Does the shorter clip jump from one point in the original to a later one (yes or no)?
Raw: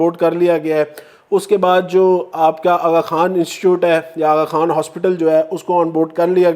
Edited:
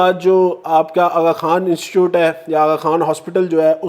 no